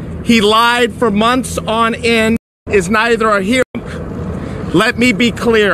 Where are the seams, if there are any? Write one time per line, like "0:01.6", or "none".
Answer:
0:02.5
0:03.7

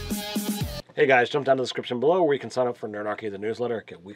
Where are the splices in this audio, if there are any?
0:02.6

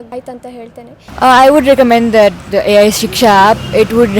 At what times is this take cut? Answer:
0:01.0

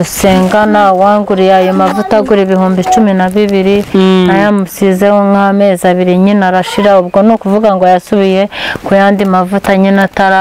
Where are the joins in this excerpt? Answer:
none

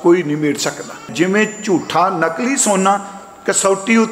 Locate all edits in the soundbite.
0:01.1

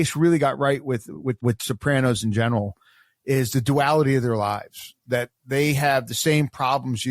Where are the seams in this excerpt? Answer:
0:01.4

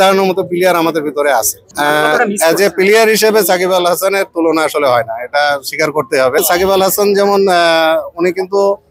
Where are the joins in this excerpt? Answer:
0:01.6
0:06.4

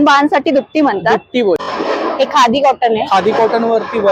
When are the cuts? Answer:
0:01.6

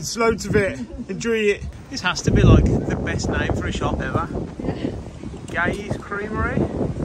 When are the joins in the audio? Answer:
0:01.7

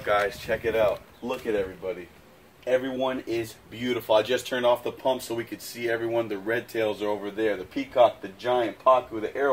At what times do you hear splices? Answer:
none

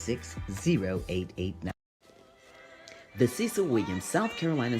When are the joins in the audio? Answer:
0:01.7

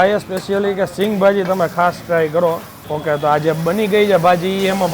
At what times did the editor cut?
0:02.7

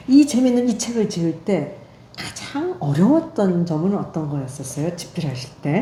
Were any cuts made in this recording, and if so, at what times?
none

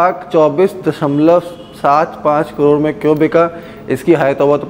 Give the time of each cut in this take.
none

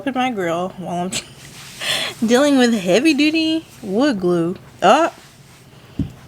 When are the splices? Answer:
none

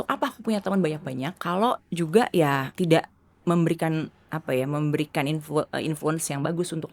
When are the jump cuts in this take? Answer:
0:01.4
0:02.7

